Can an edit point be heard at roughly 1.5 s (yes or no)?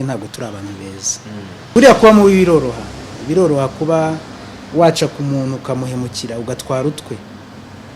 yes